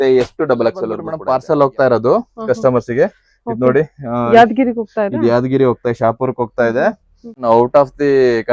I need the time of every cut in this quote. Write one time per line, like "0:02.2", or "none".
0:01.1
0:07.4